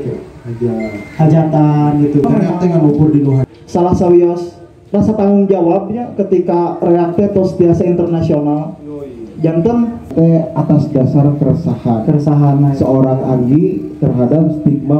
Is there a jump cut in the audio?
yes; 2 cuts; at 3.4 s, 10.1 s

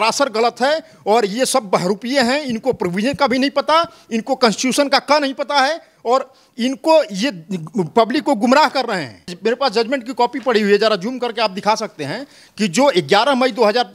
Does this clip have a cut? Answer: yes; 1 cut; at 9.3 s

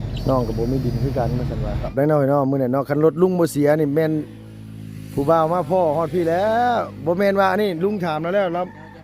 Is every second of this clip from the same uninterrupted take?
no; 1 cut; at 1.9 s

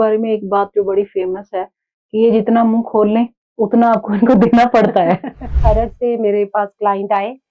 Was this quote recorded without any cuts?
no; 1 cut; at 5.6 s

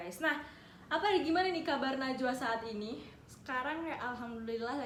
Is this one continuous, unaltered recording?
yes; 0 cuts

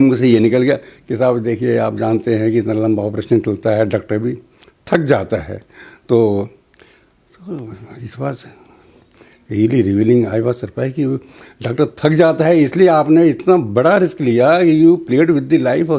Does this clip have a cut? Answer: no; 0 cuts

